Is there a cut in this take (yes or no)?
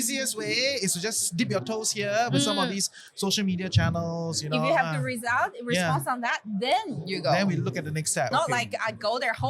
yes